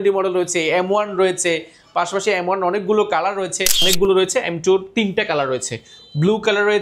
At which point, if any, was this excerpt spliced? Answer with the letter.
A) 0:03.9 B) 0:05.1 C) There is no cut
A